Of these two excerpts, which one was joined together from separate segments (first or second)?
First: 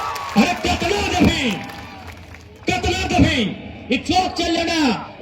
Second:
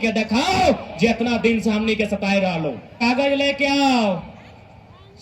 second